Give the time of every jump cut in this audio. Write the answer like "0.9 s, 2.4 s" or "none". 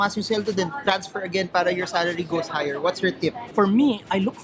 3.5 s